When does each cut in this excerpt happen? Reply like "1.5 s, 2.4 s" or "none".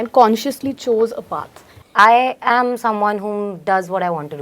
1.8 s